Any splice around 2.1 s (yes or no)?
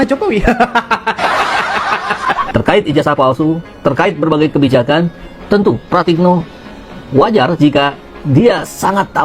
yes